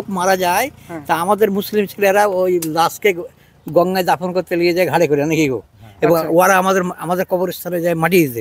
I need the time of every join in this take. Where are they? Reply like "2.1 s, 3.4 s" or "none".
none